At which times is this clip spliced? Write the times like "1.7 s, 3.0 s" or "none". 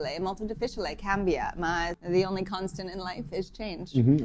2.0 s